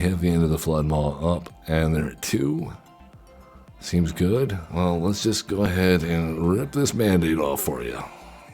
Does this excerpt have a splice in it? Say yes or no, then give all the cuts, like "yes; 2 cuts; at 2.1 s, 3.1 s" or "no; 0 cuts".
yes; 1 cut; at 4.6 s